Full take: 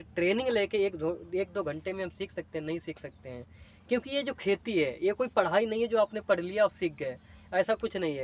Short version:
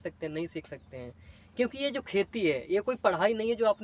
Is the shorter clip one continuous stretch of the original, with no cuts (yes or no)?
yes